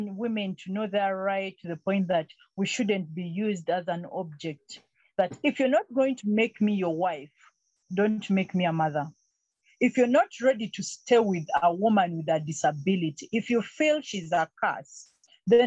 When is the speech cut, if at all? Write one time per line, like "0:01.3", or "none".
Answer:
none